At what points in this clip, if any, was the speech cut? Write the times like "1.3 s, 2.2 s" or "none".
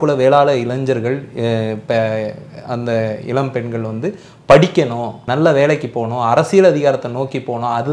5.2 s